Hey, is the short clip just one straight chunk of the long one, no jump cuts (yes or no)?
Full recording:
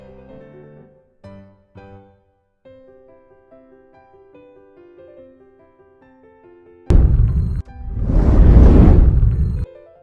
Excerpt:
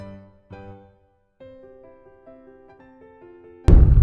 no